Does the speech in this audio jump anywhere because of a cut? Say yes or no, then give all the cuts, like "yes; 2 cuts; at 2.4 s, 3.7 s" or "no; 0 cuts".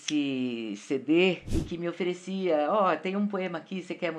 yes; 1 cut; at 1.5 s